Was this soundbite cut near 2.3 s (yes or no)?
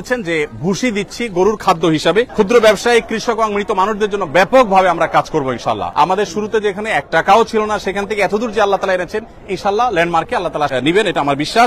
yes